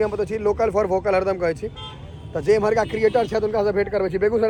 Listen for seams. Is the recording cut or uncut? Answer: uncut